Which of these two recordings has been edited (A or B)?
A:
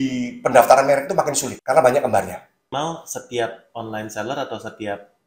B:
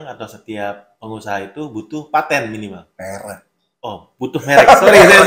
A